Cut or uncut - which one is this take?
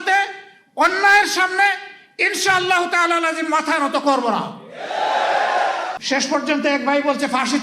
cut